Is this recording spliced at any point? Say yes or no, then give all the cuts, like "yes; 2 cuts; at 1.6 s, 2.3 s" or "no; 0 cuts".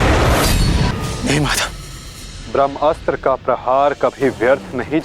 yes; 1 cut; at 0.9 s